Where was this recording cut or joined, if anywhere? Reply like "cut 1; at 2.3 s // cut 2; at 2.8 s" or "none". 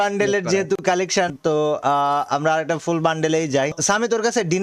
cut 1; at 1.3 s // cut 2; at 3.8 s